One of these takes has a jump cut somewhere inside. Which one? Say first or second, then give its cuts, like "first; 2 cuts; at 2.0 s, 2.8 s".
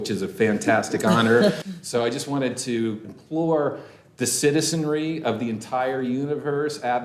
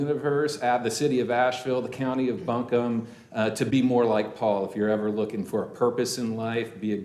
first; 2 cuts; at 1.7 s, 3.0 s